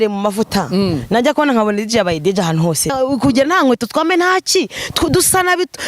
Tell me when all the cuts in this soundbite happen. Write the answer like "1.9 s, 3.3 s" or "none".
2.9 s